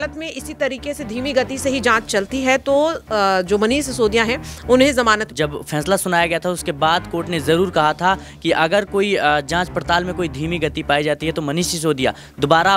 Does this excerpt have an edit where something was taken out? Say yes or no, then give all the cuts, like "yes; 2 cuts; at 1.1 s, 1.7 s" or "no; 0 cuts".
yes; 1 cut; at 5.3 s